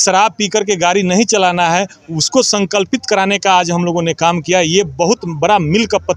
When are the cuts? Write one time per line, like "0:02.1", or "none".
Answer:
none